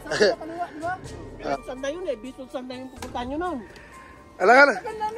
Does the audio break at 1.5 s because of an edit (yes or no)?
yes